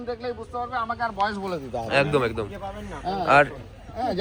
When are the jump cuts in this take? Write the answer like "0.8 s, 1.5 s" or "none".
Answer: none